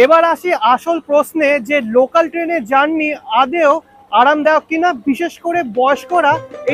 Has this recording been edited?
no; 0 cuts

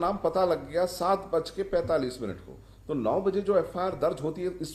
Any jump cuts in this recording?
no; 0 cuts

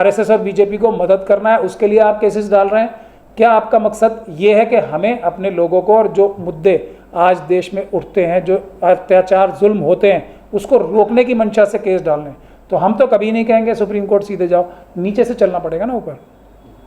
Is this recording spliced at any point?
no; 0 cuts

